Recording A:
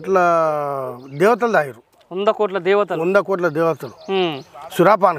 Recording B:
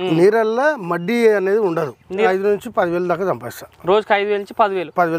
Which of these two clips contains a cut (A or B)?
B